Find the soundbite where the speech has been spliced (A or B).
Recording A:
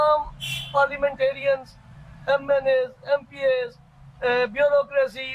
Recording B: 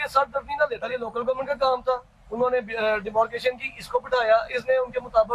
B